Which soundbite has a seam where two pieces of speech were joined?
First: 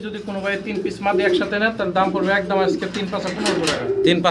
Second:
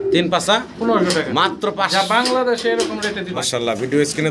second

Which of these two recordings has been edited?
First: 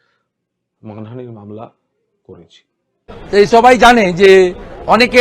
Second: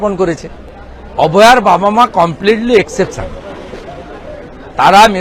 first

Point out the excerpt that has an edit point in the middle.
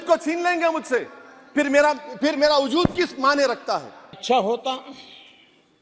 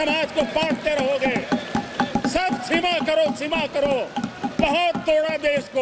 first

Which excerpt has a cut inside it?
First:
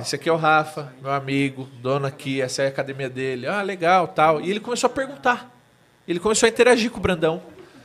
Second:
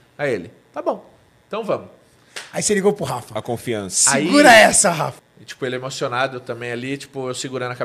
second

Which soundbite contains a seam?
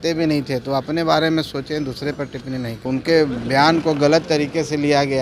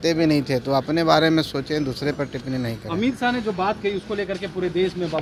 first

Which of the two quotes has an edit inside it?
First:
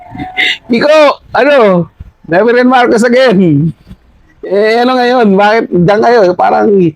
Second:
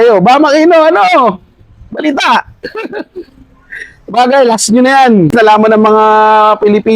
second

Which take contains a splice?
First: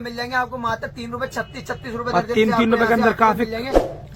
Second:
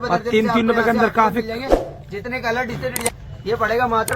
second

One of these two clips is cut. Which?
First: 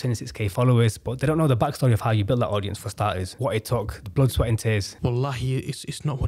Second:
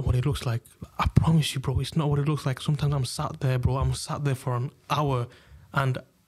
first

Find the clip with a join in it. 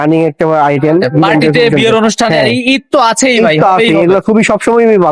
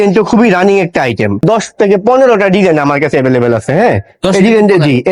second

